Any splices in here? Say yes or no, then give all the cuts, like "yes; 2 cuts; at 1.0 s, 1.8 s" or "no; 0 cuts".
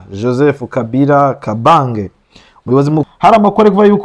yes; 1 cut; at 3.1 s